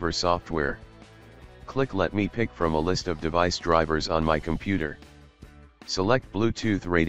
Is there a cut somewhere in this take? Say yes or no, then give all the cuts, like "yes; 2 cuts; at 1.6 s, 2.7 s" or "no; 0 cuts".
no; 0 cuts